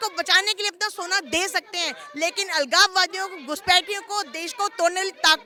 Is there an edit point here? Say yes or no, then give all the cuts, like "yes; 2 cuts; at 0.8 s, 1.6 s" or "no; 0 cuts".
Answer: no; 0 cuts